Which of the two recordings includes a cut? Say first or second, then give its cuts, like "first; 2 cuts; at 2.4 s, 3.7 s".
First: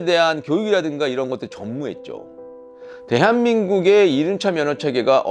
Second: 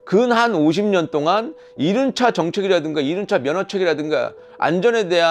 first; 1 cut; at 2.7 s